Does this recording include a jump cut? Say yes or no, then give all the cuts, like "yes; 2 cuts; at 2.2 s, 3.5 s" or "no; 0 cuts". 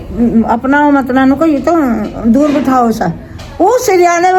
no; 0 cuts